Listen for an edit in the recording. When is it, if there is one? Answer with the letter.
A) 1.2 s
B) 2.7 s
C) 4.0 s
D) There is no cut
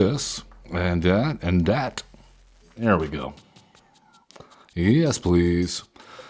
B